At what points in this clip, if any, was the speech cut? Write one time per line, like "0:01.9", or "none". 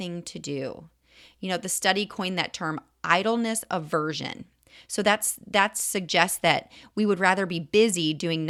none